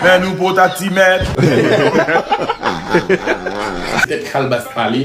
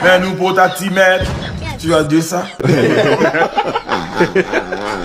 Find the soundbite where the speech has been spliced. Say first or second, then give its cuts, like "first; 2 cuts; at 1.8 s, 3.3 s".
first; 2 cuts; at 1.3 s, 4.0 s